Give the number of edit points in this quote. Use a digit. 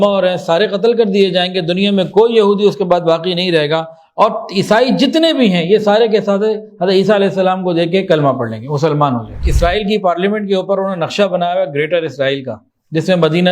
1